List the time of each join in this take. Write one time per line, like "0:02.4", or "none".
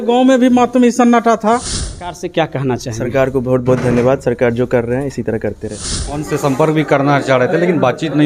0:02.2
0:06.3